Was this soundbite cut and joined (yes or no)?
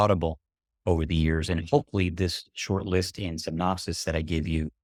no